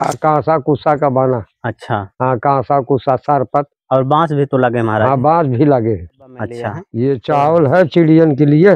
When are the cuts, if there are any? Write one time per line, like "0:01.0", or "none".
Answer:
0:06.8